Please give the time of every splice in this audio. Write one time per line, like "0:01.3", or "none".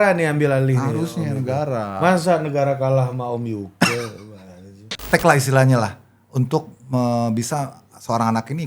0:05.0